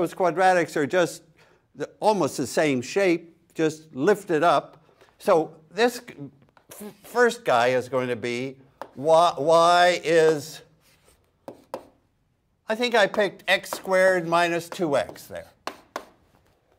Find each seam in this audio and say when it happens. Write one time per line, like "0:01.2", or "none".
none